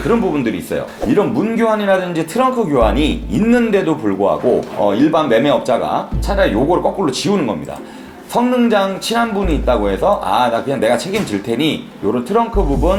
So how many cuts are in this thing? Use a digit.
0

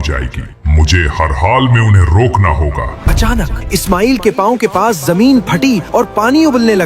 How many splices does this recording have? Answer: 1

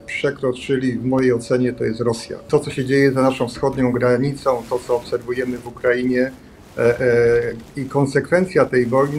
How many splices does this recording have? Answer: 1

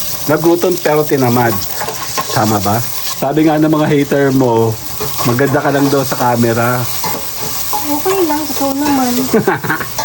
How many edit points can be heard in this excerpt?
1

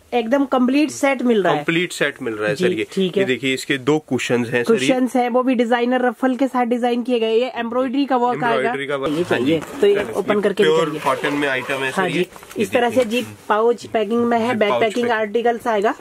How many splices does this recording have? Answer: 1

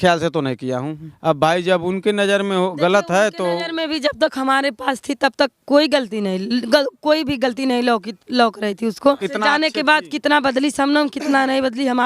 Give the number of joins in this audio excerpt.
2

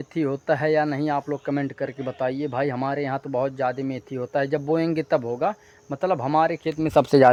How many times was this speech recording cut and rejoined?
0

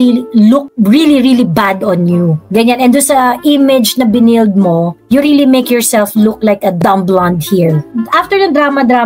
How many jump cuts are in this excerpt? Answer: 2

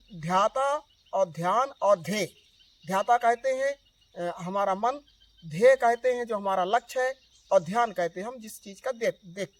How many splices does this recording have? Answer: 0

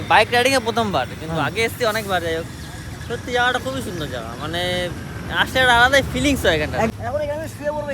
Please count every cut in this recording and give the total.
1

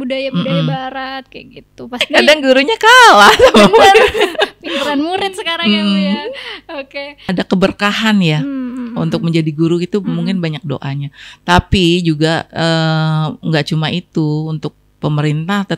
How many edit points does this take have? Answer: 2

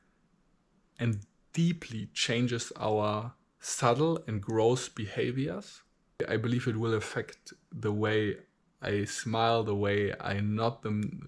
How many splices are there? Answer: 1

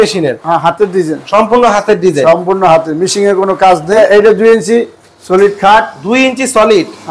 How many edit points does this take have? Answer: 1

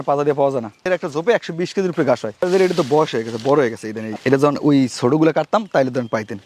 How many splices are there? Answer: 1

